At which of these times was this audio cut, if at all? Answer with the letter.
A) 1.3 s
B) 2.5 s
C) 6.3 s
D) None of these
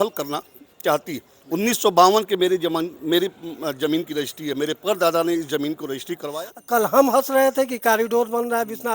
C